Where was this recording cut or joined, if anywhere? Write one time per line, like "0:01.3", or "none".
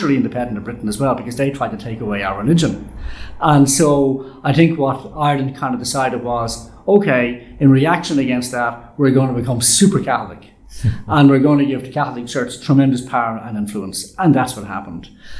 none